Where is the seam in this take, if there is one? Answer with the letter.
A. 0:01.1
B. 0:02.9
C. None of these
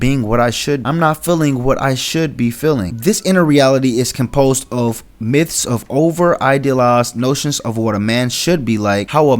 B